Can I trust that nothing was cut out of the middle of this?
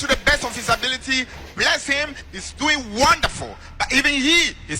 yes; 0 cuts

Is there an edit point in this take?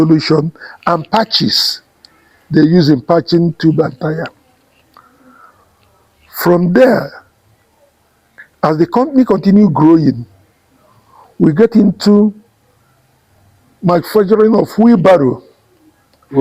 no; 0 cuts

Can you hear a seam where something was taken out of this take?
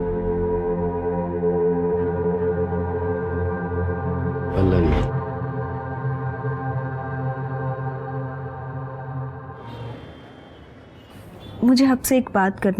yes; 1 cut; at 9.8 s

